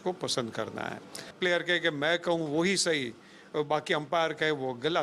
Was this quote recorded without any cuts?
no; 1 cut; at 1.3 s

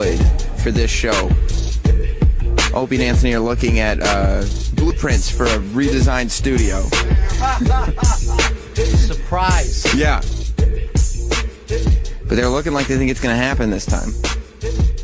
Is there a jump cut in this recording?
no; 0 cuts

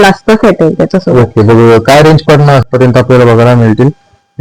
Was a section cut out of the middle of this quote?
yes; 1 cut; at 2.6 s

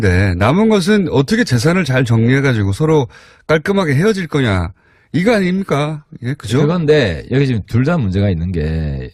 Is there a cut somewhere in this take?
no; 0 cuts

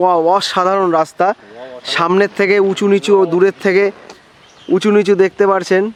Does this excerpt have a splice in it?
no; 0 cuts

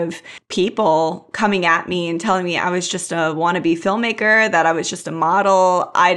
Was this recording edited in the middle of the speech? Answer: no; 0 cuts

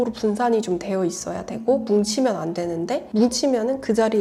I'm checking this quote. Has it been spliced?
no; 0 cuts

